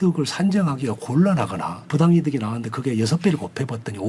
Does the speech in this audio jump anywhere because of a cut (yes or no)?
yes